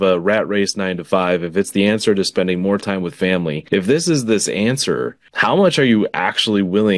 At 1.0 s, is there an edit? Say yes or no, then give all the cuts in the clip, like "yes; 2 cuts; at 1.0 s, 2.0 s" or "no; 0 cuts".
no; 2 cuts; at 3.6 s, 5.2 s